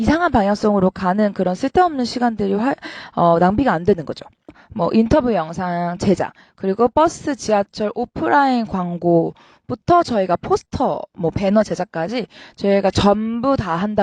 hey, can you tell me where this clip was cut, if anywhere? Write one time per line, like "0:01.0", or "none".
0:04.6